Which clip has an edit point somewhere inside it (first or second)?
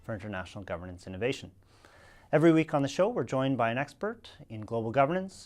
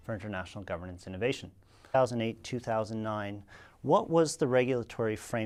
first